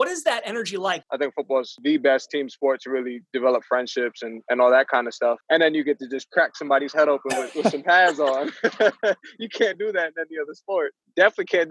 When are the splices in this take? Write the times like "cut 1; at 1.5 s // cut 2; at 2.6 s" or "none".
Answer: cut 1; at 1.0 s